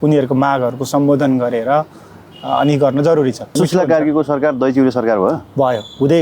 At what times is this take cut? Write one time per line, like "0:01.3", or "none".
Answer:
0:03.5